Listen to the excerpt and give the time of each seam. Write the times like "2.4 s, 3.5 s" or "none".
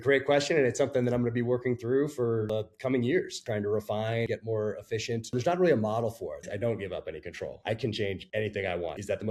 2.5 s, 3.4 s, 4.3 s, 5.3 s, 6.4 s, 7.6 s, 8.4 s